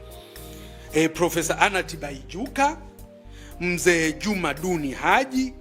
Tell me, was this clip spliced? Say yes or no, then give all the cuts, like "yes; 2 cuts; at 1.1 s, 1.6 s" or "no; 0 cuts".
yes; 1 cut; at 0.9 s